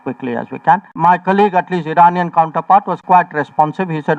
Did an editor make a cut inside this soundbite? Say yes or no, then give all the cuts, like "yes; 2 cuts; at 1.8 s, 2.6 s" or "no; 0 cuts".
yes; 1 cut; at 0.9 s